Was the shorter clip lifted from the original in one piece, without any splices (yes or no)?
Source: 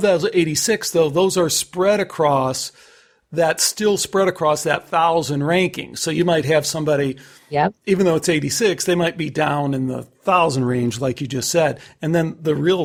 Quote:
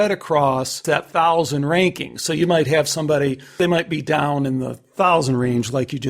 no